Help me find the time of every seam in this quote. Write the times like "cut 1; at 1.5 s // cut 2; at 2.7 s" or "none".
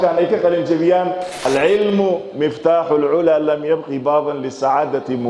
cut 1; at 1.5 s